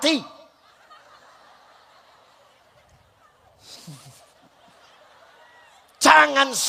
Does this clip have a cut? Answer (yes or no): no